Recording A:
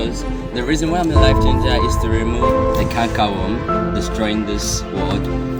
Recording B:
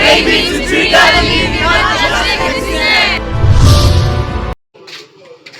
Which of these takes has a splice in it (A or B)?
B